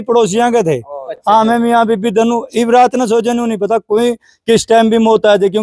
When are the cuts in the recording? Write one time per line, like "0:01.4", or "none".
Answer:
none